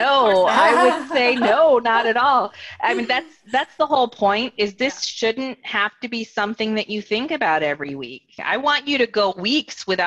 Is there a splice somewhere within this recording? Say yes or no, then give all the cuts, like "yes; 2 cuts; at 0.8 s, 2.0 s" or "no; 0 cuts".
yes; 1 cut; at 8.4 s